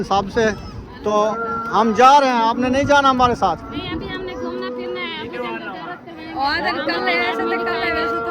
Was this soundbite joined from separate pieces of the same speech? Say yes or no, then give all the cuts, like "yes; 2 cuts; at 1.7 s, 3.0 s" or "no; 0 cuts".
yes; 1 cut; at 1.1 s